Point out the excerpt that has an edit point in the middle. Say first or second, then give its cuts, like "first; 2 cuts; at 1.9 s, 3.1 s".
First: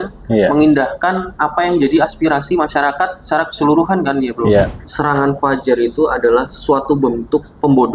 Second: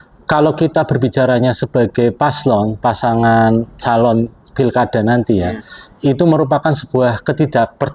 first; 1 cut; at 4.7 s